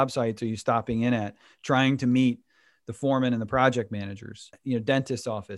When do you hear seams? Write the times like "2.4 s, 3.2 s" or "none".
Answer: 4.6 s